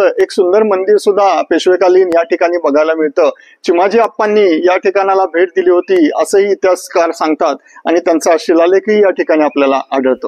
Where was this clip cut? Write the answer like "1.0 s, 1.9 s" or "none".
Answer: none

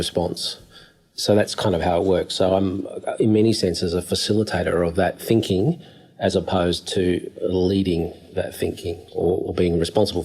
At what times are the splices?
7.3 s

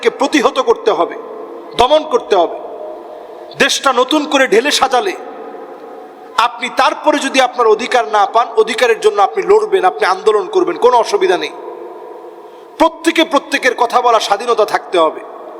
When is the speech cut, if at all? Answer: none

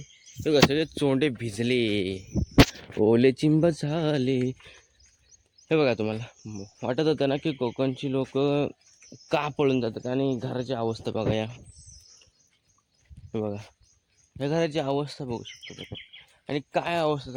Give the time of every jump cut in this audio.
none

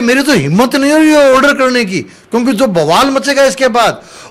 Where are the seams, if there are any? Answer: none

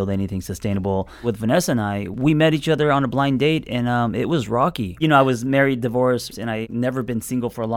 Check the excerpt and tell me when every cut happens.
1.2 s, 4.9 s

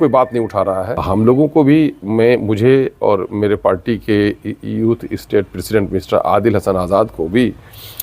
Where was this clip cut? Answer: 1.0 s

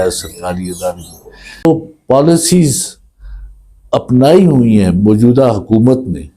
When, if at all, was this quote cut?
1.6 s

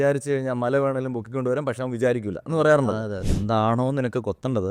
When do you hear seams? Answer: 3.2 s

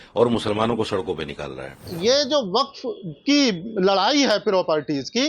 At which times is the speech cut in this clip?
1.9 s

